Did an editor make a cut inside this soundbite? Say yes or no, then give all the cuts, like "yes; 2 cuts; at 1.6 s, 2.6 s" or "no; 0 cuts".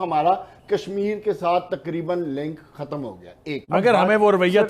yes; 1 cut; at 3.7 s